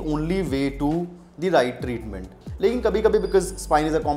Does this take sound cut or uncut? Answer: cut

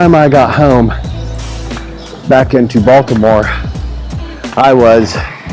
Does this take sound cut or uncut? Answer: uncut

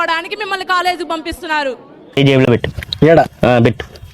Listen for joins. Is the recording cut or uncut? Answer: cut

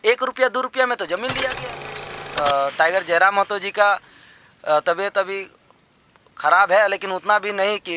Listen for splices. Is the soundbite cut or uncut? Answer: cut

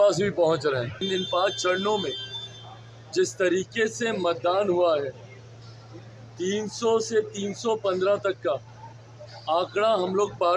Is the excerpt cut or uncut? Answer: cut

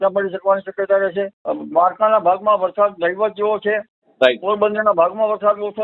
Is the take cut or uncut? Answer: cut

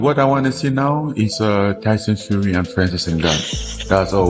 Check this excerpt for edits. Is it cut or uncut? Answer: uncut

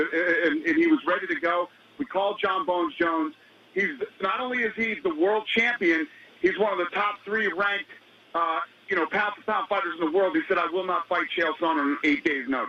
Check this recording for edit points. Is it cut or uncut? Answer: uncut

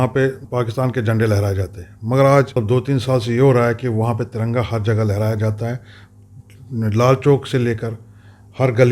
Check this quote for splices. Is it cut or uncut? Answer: cut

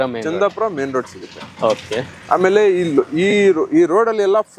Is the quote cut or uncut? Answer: uncut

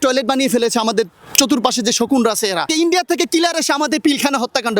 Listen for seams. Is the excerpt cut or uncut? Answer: cut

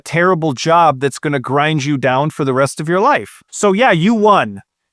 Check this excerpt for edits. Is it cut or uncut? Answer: uncut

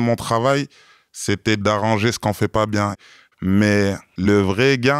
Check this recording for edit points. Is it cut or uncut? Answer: cut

